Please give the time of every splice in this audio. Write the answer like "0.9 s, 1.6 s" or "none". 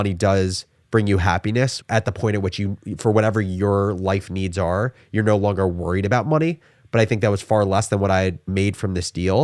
1.8 s